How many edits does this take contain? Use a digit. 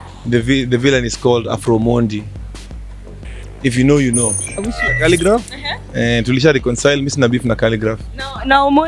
1